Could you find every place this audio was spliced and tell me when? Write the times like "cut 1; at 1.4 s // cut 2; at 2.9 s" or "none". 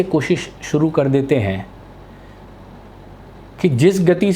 none